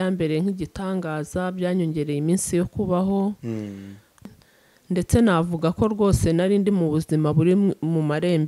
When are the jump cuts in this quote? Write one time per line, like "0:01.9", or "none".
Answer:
0:04.3